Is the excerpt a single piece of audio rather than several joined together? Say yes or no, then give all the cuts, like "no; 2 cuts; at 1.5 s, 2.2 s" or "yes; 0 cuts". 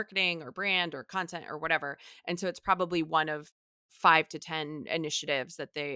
yes; 0 cuts